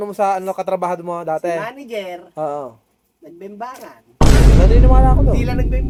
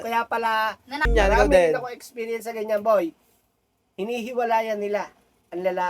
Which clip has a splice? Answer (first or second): second